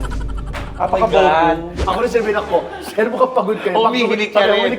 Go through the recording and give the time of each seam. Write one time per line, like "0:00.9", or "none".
0:01.8